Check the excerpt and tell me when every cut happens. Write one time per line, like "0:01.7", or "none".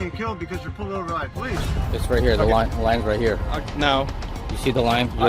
0:01.8